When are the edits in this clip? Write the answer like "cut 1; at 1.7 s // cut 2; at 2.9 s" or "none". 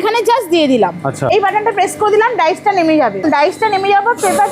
cut 1; at 1.3 s // cut 2; at 3.2 s